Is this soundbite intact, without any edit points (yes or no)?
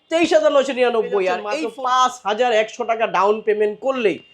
no